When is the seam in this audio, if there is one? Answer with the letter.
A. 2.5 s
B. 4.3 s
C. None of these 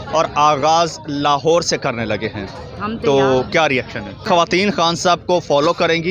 B